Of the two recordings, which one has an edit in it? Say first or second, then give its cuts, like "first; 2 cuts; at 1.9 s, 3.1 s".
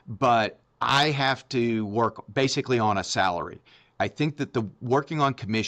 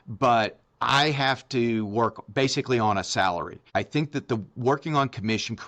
second; 1 cut; at 3.6 s